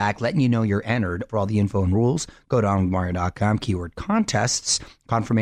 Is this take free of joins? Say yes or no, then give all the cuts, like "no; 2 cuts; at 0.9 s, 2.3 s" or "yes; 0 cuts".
no; 1 cut; at 1.2 s